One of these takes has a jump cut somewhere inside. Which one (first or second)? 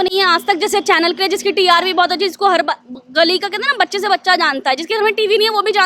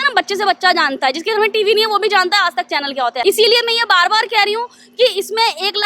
second